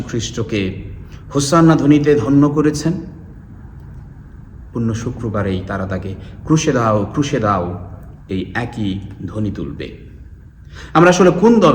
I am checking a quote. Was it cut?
no; 0 cuts

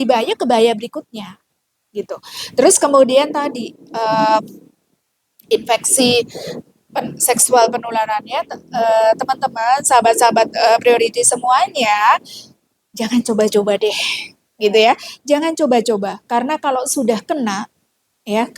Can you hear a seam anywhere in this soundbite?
no; 0 cuts

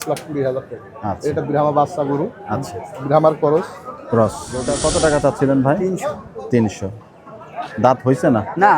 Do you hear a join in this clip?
yes; 1 cut; at 4.8 s

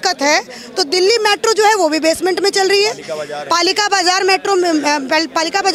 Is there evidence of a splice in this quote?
no; 0 cuts

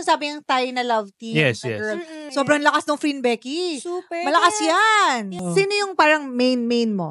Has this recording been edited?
yes; 2 cuts; at 2.2 s, 5.4 s

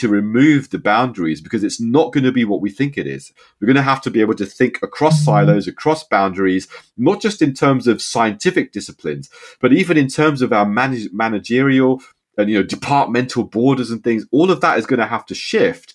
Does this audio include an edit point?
no; 0 cuts

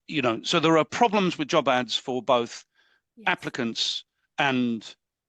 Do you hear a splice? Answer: no; 0 cuts

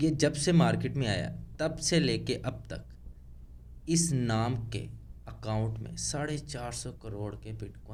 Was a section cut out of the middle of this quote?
no; 0 cuts

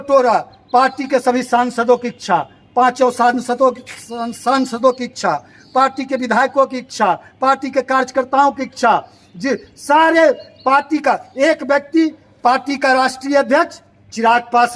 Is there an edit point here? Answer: no; 0 cuts

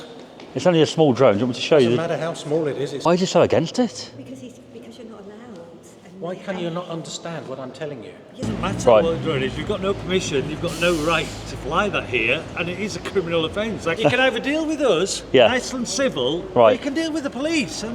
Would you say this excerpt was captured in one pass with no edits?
no; 3 cuts; at 3.0 s, 8.5 s, 13.9 s

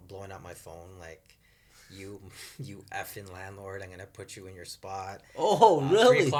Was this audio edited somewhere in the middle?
no; 0 cuts

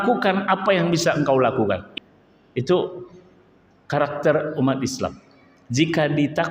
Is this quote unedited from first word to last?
no; 1 cut; at 1.9 s

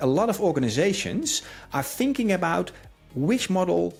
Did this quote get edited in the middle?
no; 0 cuts

